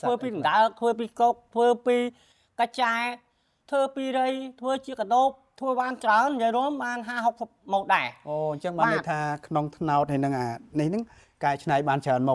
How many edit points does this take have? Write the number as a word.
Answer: zero